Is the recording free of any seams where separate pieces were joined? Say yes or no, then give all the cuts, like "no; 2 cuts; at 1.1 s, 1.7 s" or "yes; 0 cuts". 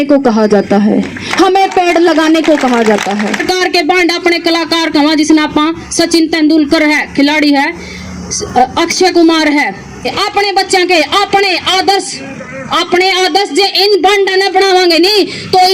no; 2 cuts; at 3.4 s, 10.2 s